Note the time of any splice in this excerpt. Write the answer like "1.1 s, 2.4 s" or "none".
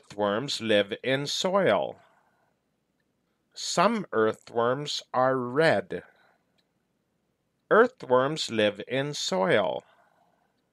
3.3 s, 7.4 s